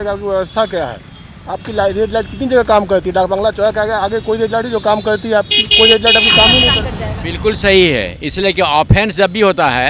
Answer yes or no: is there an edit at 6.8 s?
yes